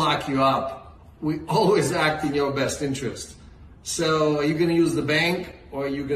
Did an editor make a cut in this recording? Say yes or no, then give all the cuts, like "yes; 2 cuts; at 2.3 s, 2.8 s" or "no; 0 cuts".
no; 0 cuts